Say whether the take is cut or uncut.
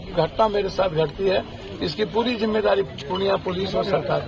uncut